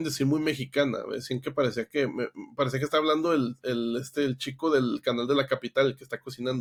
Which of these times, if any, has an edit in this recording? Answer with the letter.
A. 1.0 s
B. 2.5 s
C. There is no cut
C